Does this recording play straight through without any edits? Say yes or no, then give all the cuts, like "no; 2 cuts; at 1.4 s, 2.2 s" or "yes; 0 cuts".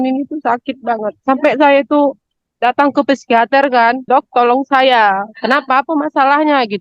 no; 1 cut; at 4.0 s